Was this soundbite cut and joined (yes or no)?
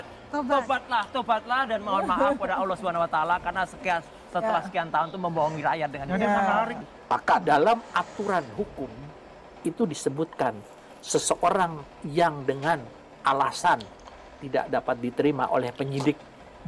no